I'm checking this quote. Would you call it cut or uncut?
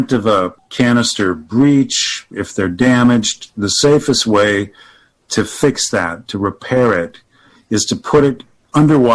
uncut